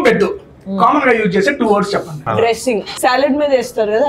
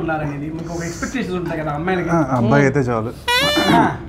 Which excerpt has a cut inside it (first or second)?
first